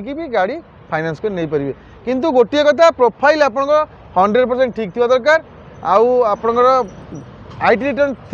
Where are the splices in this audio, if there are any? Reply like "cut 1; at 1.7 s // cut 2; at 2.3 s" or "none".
none